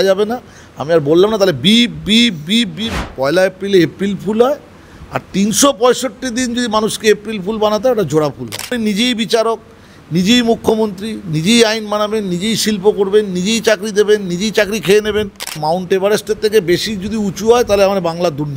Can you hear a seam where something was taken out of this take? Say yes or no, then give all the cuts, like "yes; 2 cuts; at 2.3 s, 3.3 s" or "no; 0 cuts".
yes; 3 cuts; at 2.9 s, 8.7 s, 15.6 s